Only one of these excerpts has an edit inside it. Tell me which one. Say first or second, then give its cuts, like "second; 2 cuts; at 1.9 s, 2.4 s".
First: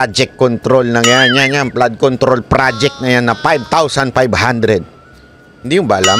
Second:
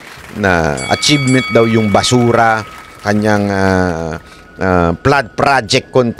second; 1 cut; at 2.9 s